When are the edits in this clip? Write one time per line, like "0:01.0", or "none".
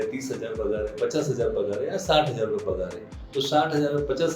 none